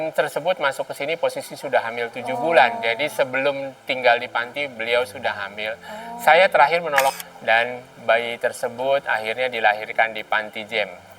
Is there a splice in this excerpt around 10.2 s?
no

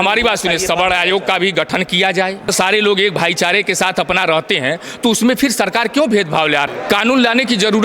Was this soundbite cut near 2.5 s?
yes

